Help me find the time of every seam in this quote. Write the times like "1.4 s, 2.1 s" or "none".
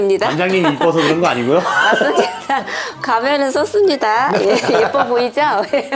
none